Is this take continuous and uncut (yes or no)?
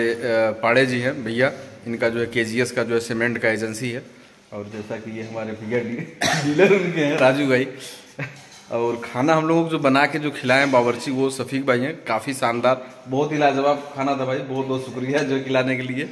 yes